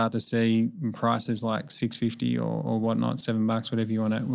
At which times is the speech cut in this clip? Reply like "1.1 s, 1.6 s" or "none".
none